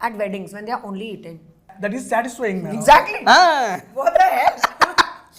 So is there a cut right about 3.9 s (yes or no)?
no